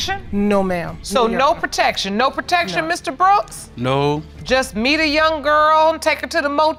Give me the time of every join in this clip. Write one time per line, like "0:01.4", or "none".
none